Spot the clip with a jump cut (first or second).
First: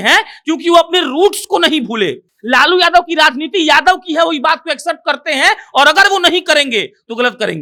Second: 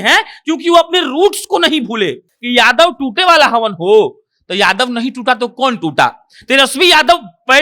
second